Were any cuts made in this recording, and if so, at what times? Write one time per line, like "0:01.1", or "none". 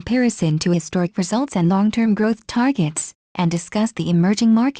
0:03.7